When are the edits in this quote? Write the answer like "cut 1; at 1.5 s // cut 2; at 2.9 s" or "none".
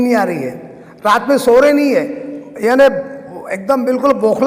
none